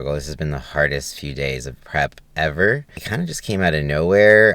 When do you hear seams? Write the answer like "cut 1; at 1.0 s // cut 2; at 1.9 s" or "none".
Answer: cut 1; at 3.0 s